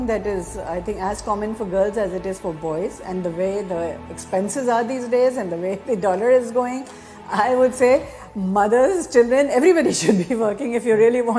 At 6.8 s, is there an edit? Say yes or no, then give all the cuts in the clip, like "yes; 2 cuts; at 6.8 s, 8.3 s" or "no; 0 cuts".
no; 0 cuts